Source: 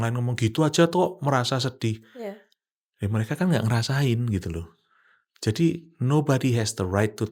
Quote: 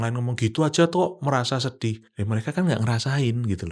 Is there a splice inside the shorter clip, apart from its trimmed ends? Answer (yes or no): yes